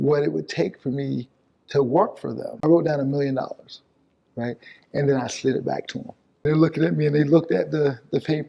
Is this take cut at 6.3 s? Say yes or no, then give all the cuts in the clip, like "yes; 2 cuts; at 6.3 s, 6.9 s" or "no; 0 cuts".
yes; 2 cuts; at 2.6 s, 6.3 s